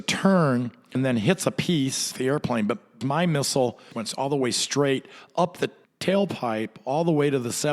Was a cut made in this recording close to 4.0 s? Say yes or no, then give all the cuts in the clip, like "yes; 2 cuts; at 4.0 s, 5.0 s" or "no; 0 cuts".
yes; 4 cuts; at 1.0 s, 2.1 s, 3.0 s, 4.0 s